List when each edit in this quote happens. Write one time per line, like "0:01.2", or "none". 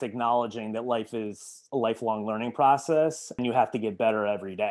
0:03.4